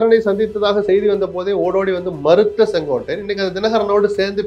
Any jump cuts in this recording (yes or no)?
no